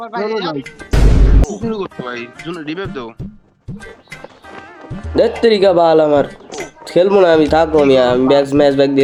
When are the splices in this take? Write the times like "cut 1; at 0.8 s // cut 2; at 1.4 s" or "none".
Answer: none